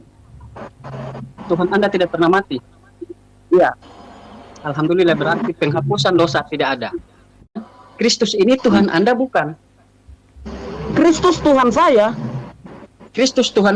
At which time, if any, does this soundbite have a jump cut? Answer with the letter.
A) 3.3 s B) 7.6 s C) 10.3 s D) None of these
B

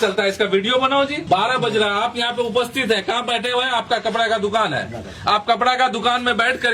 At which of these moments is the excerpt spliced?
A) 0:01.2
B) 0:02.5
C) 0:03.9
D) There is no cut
A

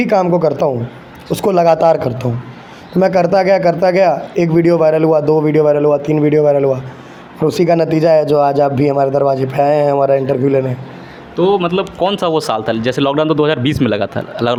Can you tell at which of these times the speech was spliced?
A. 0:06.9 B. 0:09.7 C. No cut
C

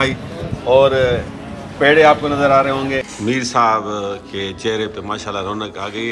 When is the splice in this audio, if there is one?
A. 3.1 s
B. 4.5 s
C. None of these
A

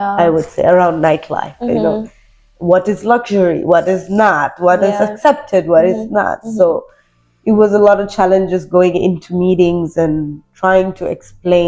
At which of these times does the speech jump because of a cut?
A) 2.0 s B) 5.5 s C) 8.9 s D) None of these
D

